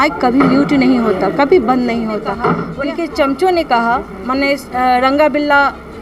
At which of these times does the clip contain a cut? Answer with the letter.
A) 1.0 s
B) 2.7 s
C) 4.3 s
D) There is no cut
B